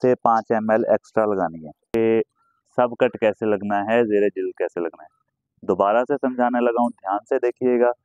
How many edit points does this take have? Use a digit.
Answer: 1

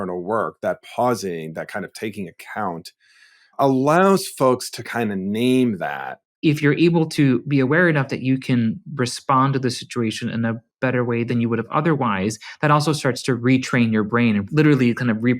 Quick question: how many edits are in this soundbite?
3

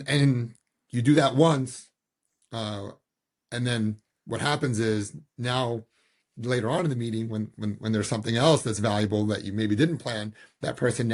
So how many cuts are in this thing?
0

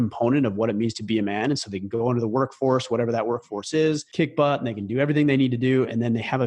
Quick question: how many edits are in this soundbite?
1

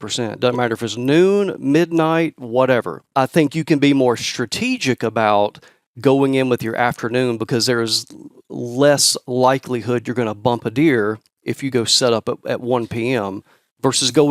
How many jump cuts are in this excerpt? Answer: 1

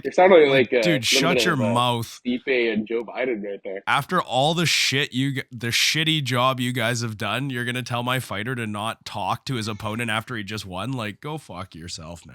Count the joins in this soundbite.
1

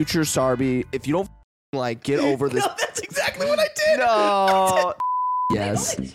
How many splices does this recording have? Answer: 1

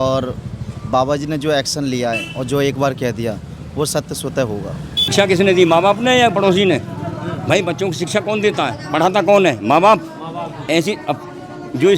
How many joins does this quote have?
1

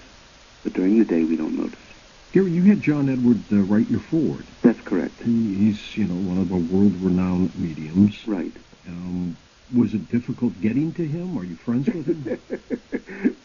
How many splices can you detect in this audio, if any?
1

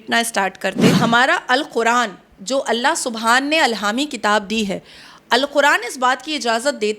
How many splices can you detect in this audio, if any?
1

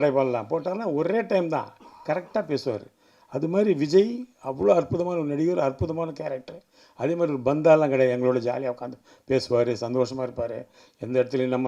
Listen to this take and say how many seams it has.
0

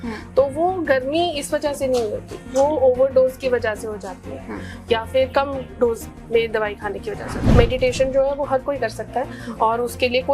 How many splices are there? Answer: 1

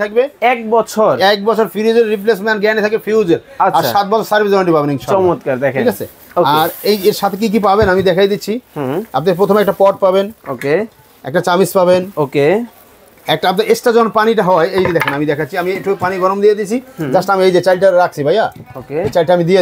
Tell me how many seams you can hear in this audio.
0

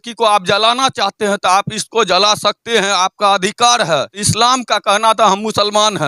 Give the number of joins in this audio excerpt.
1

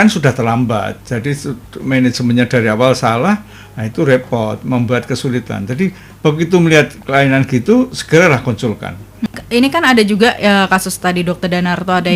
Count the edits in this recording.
1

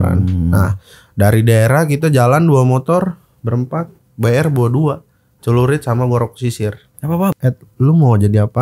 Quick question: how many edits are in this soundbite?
1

